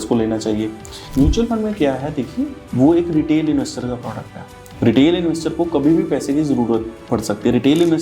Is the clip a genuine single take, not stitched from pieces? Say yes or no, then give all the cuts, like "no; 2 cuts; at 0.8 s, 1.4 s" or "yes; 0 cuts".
no; 1 cut; at 1.0 s